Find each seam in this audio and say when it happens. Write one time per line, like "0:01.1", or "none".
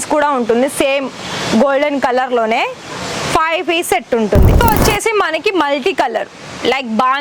0:04.6